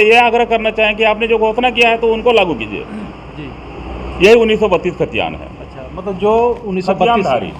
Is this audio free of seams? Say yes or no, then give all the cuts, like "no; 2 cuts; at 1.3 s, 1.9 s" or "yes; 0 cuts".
yes; 0 cuts